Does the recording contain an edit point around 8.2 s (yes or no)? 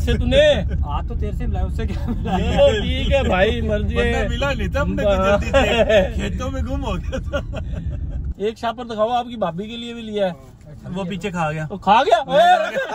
yes